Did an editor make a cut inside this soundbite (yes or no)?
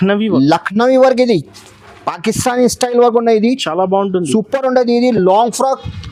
no